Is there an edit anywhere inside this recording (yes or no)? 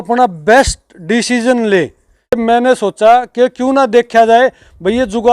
yes